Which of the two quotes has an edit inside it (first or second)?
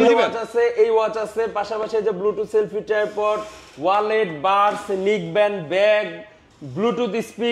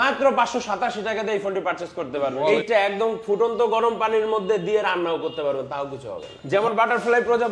second